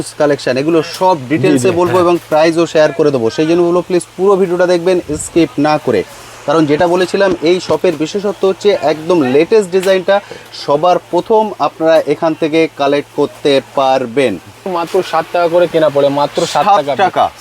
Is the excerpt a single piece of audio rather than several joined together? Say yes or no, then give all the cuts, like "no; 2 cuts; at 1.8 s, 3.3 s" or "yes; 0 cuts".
no; 1 cut; at 14.7 s